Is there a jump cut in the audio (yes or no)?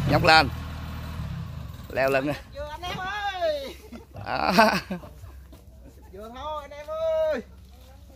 no